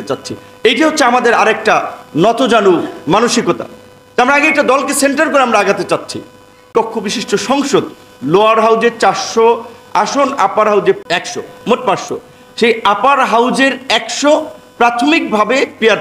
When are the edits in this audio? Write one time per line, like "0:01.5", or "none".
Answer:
0:06.7
0:11.0